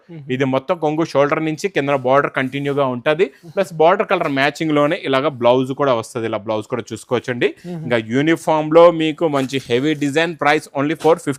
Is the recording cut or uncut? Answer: uncut